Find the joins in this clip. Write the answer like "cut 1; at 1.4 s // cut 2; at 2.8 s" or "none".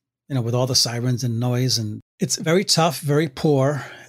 cut 1; at 1.9 s